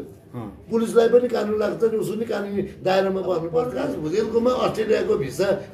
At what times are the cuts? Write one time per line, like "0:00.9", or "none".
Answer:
0:03.7